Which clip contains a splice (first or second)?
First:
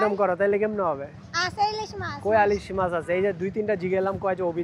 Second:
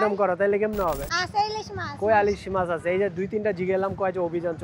second